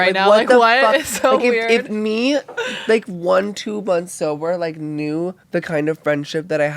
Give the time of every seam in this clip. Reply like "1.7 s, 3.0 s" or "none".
5.4 s